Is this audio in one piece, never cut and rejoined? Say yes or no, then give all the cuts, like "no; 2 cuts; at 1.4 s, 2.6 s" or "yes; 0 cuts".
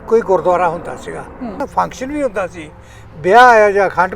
no; 1 cut; at 1.6 s